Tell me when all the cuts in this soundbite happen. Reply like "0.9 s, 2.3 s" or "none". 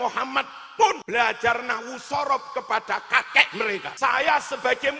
1.0 s, 3.9 s